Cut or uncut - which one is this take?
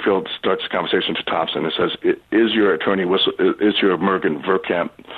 uncut